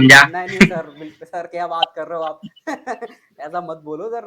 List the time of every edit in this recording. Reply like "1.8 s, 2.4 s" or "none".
none